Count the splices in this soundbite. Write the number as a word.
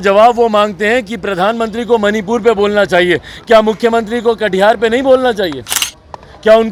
zero